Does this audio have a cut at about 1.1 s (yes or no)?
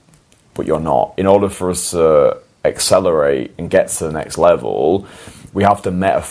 yes